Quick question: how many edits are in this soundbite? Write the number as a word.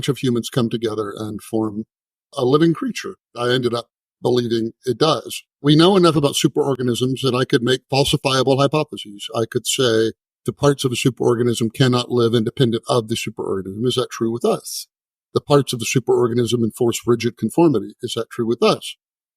two